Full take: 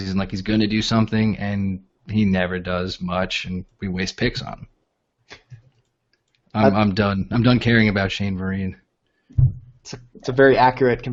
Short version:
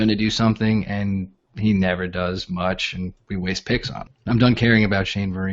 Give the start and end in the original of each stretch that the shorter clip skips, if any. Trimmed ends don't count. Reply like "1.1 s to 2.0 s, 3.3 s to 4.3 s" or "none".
4.7 s to 7.2 s